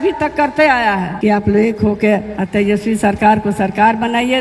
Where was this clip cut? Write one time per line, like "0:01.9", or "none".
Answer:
0:01.1
0:02.4